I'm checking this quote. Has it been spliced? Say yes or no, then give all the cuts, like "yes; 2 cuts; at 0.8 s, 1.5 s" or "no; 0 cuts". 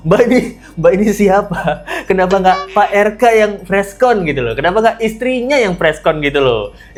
no; 0 cuts